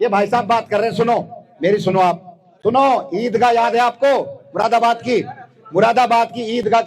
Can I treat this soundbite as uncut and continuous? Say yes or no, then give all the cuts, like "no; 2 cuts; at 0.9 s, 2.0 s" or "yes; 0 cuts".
yes; 0 cuts